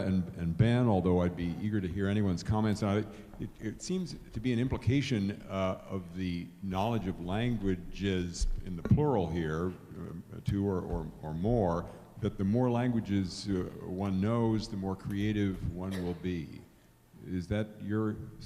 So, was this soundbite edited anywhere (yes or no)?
yes